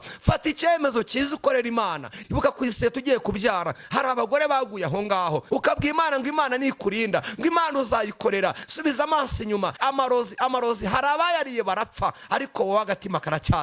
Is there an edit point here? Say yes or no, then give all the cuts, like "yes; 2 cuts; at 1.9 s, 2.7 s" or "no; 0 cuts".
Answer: yes; 3 cuts; at 2.2 s, 5.4 s, 9.8 s